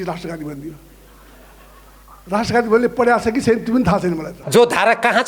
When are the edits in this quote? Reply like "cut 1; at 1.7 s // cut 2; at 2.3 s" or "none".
cut 1; at 4.3 s